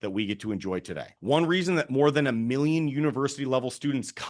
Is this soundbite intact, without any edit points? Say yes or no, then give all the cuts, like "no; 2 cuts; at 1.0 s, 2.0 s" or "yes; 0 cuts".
no; 1 cut; at 1.1 s